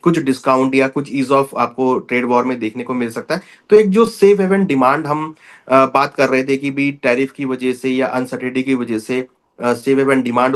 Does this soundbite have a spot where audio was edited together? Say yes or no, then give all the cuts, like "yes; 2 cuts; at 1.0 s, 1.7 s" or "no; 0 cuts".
no; 0 cuts